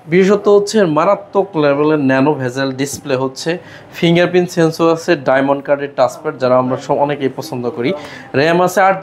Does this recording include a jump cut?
no; 0 cuts

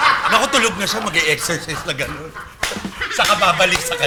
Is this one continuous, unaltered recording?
yes; 0 cuts

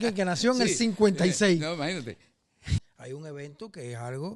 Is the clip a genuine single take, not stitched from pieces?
no; 1 cut; at 2.8 s

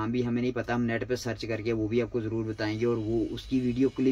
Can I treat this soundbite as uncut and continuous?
yes; 0 cuts

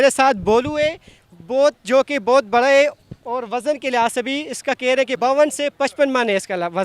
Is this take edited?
yes; 1 cut; at 5.2 s

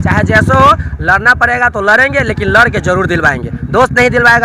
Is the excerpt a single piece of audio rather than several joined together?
yes; 0 cuts

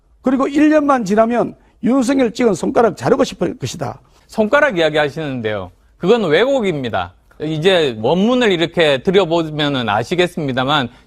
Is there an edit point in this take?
yes; 1 cut; at 4.2 s

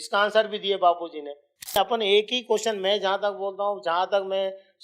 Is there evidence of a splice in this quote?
yes; 1 cut; at 1.8 s

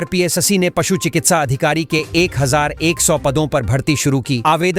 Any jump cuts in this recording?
no; 0 cuts

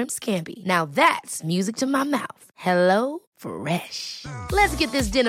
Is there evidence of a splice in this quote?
no; 0 cuts

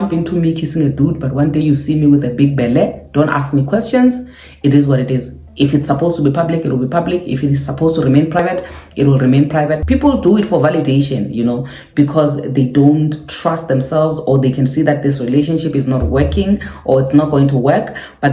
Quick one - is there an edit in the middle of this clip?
yes; 2 cuts; at 8.4 s, 9.8 s

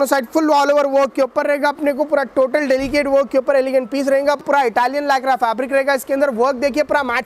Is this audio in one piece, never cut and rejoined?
no; 1 cut; at 4.4 s

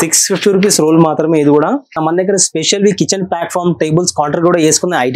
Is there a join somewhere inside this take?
yes; 1 cut; at 1.9 s

